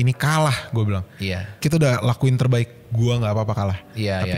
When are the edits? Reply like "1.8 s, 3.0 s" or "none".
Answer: 1.6 s